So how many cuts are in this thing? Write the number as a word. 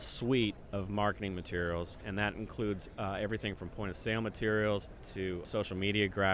two